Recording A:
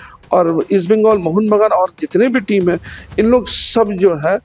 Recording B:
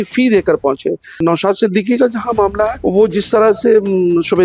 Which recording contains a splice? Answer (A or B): B